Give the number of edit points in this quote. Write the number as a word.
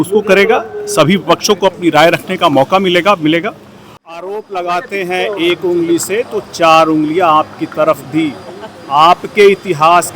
one